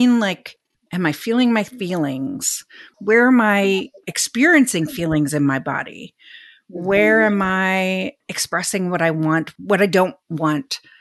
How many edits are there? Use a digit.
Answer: 0